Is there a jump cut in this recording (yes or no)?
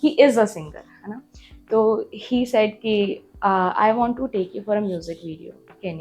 no